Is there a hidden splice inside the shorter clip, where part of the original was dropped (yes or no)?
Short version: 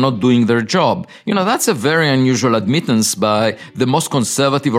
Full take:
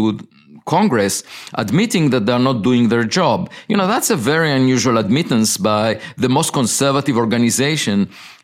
no